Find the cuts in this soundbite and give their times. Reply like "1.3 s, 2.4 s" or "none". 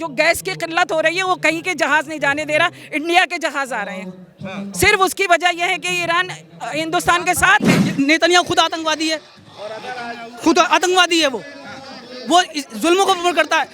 7.8 s